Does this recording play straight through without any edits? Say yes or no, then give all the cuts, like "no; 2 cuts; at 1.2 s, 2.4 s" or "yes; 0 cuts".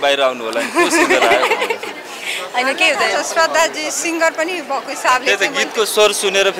yes; 0 cuts